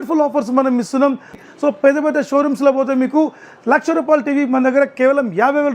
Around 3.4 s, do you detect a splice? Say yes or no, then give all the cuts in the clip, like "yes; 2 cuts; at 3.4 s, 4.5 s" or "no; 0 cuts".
no; 1 cut; at 1.4 s